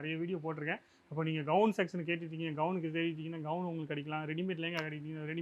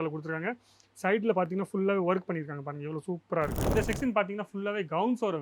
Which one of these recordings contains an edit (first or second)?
second